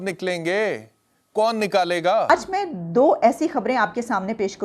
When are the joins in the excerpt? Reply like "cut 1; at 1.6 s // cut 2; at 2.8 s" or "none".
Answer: cut 1; at 2.3 s